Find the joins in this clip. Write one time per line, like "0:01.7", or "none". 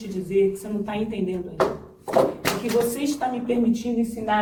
none